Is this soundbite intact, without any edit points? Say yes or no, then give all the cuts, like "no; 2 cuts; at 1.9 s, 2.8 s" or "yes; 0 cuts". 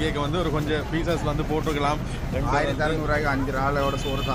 yes; 0 cuts